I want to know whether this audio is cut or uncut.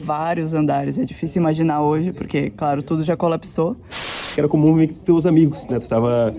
cut